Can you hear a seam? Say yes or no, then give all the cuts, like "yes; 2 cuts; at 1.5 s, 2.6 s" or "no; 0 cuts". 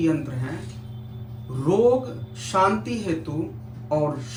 no; 0 cuts